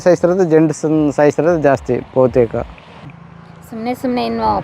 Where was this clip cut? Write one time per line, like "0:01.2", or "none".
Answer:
0:03.0